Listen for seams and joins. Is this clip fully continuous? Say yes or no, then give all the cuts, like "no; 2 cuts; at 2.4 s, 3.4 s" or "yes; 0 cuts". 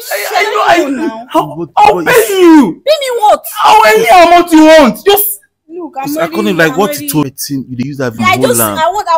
yes; 0 cuts